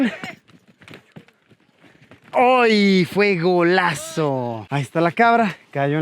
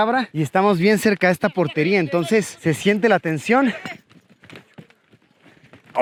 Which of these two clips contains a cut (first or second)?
first